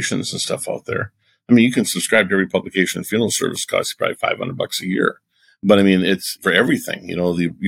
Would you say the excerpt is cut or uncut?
cut